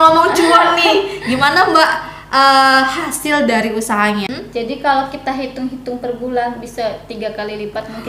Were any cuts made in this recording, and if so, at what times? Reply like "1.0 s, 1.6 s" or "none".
4.3 s